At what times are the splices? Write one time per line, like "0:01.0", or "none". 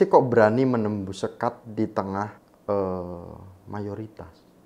0:02.5